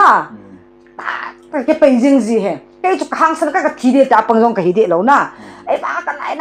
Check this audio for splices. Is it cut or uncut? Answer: uncut